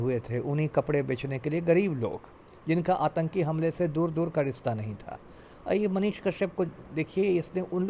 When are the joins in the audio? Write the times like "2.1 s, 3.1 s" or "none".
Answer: none